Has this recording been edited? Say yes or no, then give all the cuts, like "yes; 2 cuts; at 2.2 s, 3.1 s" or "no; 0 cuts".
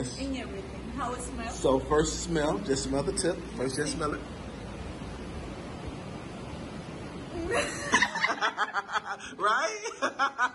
no; 0 cuts